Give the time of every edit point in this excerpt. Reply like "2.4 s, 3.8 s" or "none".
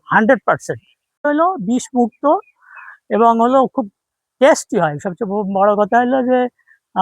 1.2 s